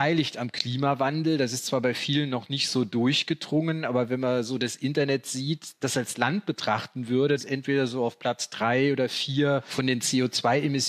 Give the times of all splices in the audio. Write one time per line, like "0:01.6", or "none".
0:07.4